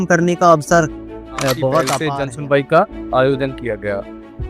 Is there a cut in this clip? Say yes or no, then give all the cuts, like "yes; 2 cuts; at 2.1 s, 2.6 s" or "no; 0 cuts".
yes; 1 cut; at 2.0 s